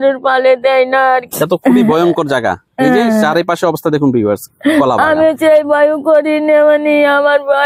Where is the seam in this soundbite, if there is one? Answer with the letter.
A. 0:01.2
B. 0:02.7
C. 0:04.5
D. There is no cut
A